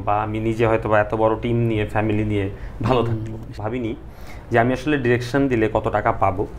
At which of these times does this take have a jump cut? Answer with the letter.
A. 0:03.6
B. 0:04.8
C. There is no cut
A